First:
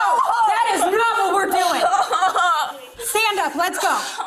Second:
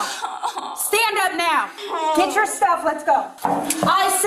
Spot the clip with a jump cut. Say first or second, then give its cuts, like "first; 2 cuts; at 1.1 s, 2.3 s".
second; 2 cuts; at 1.8 s, 3.3 s